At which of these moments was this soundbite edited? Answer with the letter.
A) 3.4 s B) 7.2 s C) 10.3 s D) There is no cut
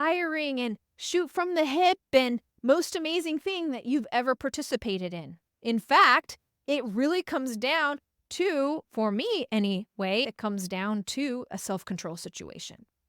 C